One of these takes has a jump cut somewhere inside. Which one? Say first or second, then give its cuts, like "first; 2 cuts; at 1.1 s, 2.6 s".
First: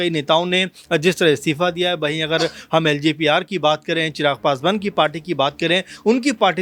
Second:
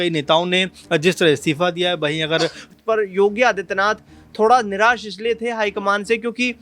second; 1 cut; at 2.7 s